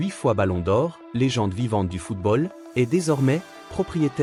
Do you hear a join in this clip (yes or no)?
no